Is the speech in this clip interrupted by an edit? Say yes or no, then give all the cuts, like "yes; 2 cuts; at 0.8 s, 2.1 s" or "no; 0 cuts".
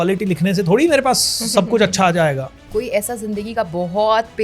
yes; 1 cut; at 2.6 s